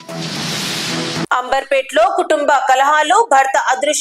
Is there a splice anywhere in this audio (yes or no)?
yes